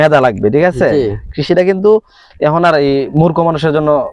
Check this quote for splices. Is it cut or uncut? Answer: uncut